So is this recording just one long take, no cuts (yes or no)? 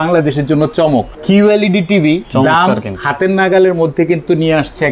no